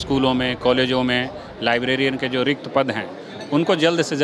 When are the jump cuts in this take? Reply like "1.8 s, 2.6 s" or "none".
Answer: none